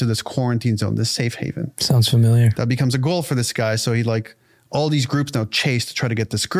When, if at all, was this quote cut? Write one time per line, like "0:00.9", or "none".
none